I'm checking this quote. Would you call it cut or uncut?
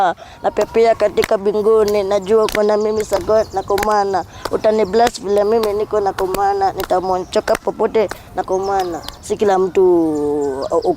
cut